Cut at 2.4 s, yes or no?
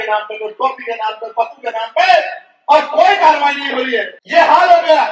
no